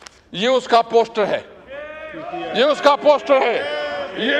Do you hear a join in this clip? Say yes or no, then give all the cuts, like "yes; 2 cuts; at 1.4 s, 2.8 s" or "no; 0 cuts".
no; 0 cuts